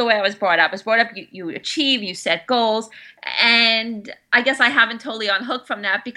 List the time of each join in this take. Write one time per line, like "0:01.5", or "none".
none